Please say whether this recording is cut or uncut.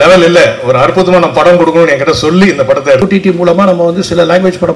cut